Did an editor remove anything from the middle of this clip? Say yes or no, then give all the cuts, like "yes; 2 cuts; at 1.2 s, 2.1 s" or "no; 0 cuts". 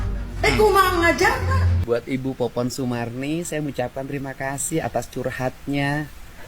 yes; 1 cut; at 1.7 s